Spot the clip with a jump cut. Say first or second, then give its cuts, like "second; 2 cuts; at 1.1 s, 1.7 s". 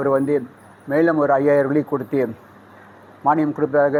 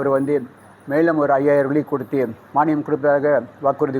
second; 1 cut; at 2.4 s